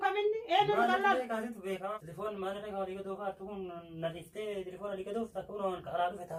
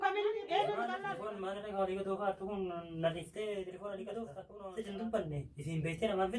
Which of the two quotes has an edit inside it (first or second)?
second